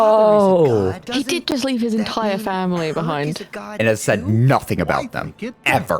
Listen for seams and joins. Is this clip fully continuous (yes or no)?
no